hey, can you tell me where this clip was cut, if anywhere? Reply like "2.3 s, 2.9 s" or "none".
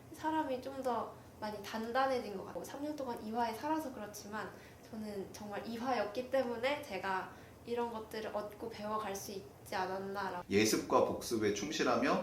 2.5 s, 10.4 s